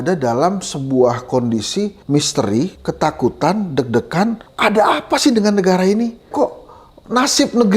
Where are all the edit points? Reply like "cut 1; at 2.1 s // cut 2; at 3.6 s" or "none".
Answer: cut 1; at 2.0 s // cut 2; at 2.8 s // cut 3; at 4.5 s // cut 4; at 6.3 s

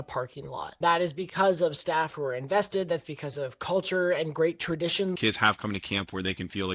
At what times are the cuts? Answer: cut 1; at 0.8 s // cut 2; at 5.2 s

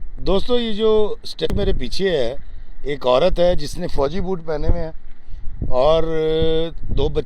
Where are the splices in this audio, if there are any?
cut 1; at 1.5 s

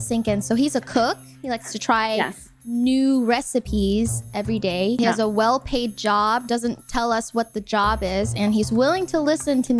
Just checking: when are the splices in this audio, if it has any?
none

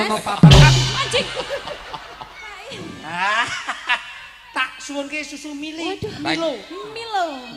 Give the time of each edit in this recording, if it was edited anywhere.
cut 1; at 2.7 s

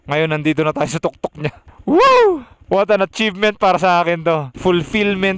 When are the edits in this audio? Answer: cut 1; at 1.7 s // cut 2; at 2.5 s // cut 3; at 4.5 s

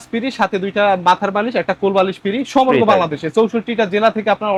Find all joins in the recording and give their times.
none

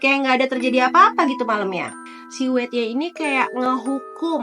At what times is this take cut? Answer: cut 1; at 1.9 s

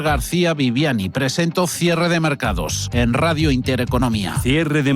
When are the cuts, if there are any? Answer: none

